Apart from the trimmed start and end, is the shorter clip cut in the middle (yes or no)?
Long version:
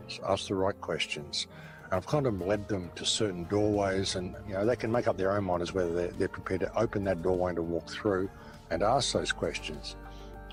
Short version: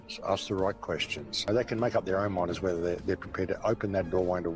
yes